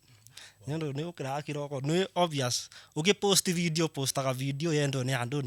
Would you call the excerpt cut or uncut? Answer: uncut